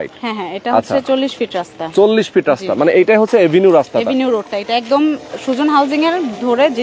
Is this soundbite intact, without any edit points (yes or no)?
yes